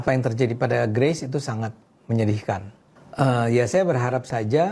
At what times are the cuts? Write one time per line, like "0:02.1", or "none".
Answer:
0:02.8